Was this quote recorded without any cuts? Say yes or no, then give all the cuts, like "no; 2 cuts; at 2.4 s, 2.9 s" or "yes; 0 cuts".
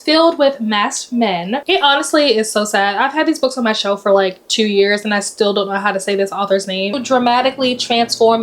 no; 2 cuts; at 1.6 s, 7.0 s